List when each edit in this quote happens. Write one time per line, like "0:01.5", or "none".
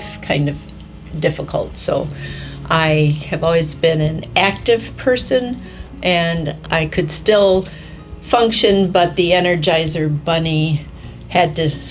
0:06.6